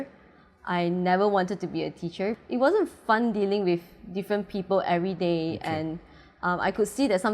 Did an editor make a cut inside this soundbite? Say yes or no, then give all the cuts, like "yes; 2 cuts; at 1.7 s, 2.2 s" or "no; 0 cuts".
yes; 1 cut; at 2.4 s